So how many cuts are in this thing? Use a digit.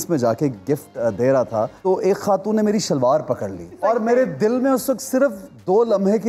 2